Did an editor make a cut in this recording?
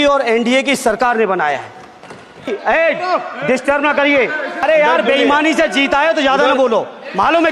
yes; 2 cuts; at 2.5 s, 4.6 s

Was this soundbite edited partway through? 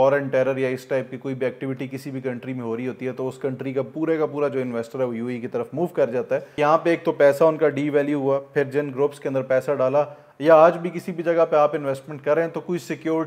yes; 1 cut; at 6.5 s

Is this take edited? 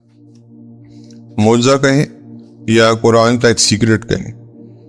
no; 0 cuts

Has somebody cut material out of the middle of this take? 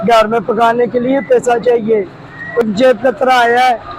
yes; 1 cut; at 2.7 s

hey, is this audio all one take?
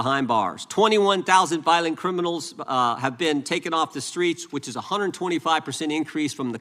yes; 0 cuts

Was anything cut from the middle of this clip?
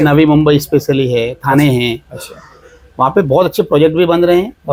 no; 0 cuts

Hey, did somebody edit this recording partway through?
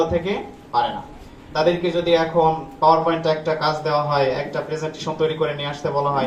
no; 0 cuts

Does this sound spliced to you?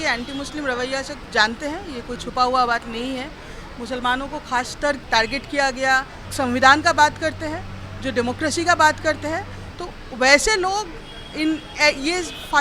yes; 3 cuts; at 1.2 s, 5.0 s, 6.2 s

